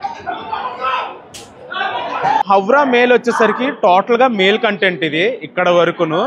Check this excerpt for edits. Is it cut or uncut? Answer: cut